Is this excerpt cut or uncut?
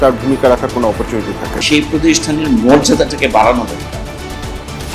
cut